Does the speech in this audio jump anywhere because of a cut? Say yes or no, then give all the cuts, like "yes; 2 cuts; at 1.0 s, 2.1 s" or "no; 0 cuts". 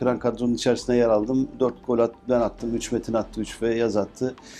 no; 0 cuts